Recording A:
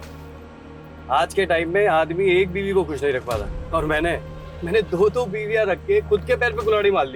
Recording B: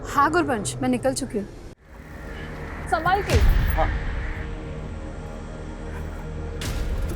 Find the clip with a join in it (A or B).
B